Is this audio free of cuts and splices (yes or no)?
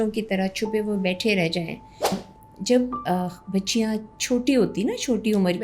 no